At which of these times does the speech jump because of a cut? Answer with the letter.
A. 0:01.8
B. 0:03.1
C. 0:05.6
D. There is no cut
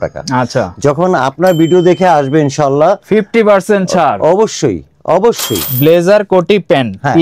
C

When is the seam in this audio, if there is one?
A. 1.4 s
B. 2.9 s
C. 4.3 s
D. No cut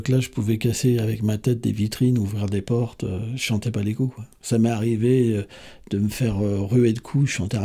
C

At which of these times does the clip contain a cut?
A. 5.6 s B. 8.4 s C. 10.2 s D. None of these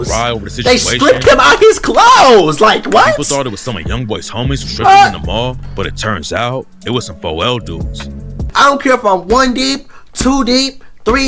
B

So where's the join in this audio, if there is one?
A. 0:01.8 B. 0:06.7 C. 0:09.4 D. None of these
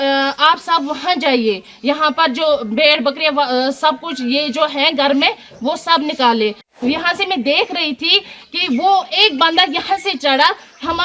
B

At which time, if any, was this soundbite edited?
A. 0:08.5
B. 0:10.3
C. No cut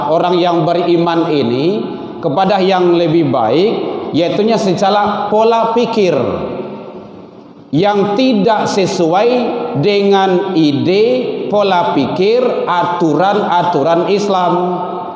C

